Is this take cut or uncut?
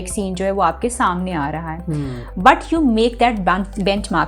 uncut